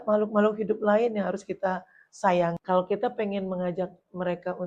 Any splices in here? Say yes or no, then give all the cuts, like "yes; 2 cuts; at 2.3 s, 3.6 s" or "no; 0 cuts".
yes; 1 cut; at 2.6 s